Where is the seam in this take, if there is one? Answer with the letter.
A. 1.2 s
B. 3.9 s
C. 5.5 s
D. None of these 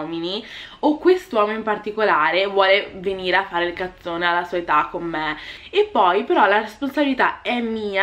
C